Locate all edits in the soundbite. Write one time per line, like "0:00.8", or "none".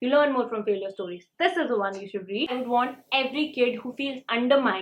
0:02.5